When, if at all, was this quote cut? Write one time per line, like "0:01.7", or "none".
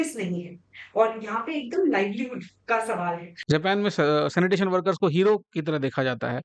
0:03.3